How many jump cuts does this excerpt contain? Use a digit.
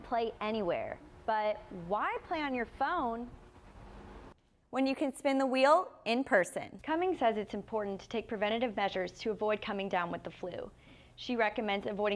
1